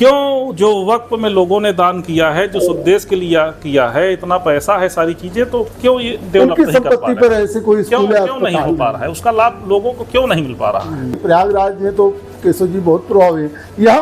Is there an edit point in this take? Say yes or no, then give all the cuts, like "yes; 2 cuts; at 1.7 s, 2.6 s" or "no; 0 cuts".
yes; 1 cut; at 11.2 s